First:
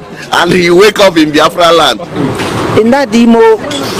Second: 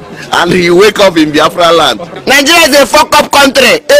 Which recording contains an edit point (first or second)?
second